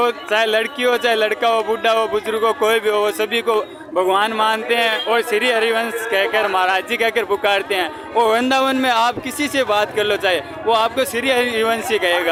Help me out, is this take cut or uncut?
uncut